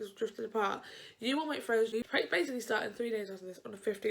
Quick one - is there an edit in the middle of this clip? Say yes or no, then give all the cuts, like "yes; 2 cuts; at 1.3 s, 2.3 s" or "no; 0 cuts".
yes; 1 cut; at 1.9 s